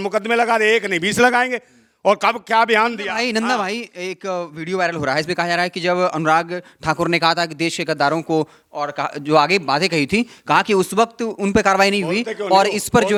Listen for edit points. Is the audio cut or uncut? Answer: uncut